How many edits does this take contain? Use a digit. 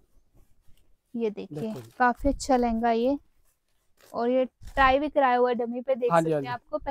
0